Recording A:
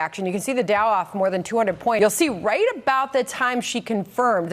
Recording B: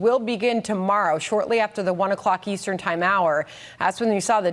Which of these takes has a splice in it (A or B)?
A